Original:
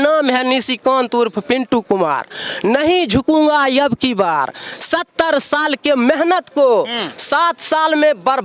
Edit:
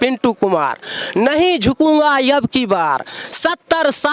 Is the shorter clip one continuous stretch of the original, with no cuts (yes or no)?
yes